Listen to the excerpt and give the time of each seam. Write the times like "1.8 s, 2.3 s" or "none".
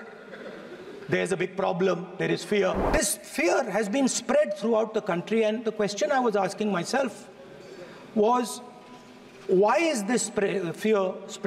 2.8 s